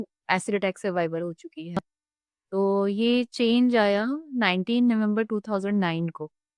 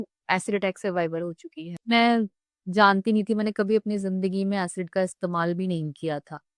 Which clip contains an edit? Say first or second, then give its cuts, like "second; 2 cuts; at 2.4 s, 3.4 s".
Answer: second; 1 cut; at 1.7 s